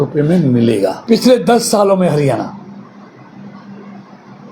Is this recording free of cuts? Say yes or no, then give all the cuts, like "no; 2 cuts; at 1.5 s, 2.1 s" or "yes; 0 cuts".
no; 1 cut; at 1.0 s